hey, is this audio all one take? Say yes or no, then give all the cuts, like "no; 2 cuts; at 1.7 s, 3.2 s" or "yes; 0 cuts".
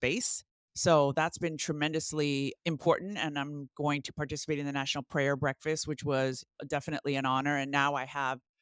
yes; 0 cuts